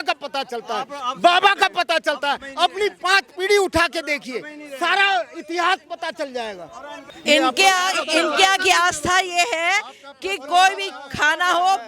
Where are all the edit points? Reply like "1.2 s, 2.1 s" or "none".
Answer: 7.1 s